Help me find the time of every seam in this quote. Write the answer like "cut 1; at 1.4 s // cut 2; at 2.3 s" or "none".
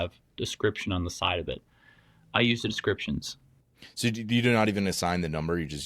cut 1; at 4.0 s